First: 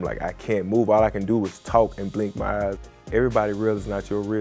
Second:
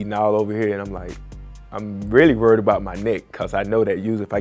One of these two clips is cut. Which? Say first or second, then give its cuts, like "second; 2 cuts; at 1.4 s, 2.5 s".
first; 1 cut; at 2.8 s